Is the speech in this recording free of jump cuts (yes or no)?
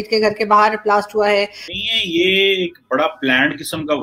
no